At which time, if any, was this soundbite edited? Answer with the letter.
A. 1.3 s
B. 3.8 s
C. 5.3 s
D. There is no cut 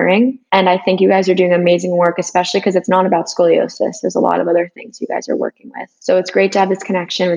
D